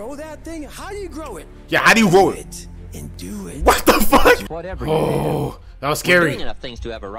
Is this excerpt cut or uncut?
cut